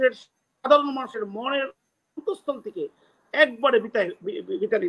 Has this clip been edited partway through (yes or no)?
no